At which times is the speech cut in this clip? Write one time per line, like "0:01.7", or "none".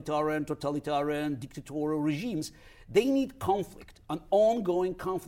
none